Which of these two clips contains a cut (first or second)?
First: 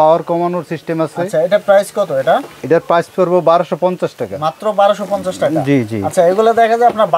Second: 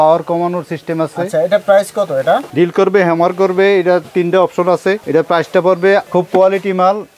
second